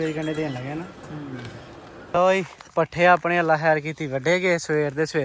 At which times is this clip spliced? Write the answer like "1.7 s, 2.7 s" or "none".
2.0 s